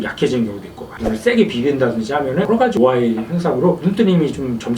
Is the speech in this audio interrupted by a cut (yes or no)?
yes